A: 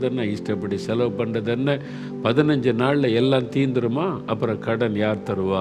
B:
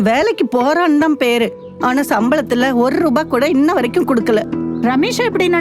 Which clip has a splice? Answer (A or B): B